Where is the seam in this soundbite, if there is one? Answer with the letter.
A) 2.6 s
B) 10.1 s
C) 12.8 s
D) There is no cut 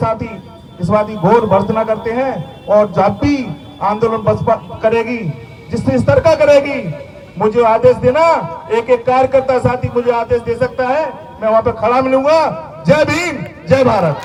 D